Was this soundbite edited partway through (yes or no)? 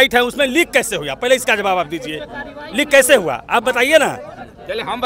no